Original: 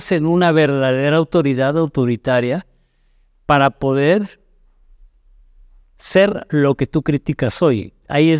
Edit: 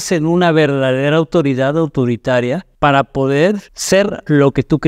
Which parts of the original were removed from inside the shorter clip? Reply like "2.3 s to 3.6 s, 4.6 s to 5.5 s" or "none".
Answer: 2.7 s to 3.3 s, 4.4 s to 5.9 s